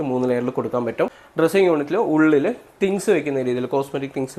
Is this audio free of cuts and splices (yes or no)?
no